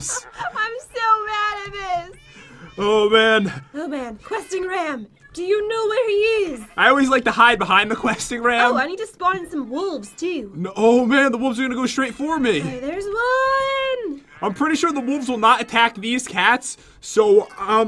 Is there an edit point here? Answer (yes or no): yes